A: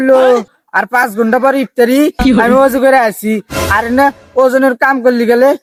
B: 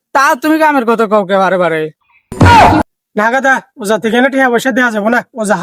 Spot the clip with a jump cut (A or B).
B